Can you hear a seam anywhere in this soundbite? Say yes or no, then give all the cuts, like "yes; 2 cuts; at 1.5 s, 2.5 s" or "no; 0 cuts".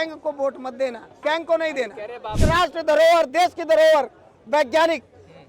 yes; 2 cuts; at 1.1 s, 2.4 s